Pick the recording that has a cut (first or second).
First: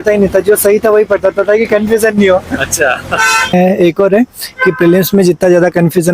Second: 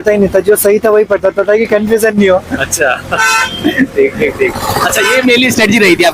first